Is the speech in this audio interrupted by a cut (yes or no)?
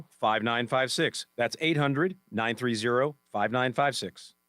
yes